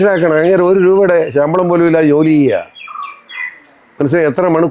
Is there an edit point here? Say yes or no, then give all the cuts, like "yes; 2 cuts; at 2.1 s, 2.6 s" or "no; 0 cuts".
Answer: no; 0 cuts